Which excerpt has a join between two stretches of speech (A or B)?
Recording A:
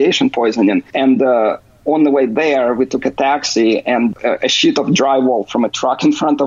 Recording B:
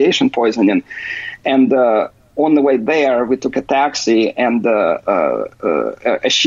A